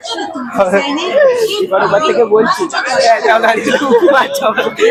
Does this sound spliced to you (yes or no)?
no